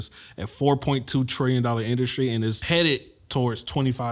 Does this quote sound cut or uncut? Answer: cut